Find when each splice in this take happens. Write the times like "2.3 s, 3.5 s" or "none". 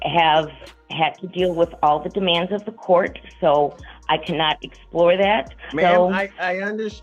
5.7 s